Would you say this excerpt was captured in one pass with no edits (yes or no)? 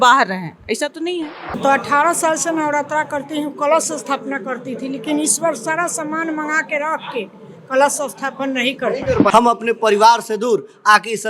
no